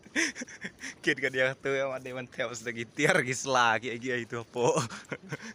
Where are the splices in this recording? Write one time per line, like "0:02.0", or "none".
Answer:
none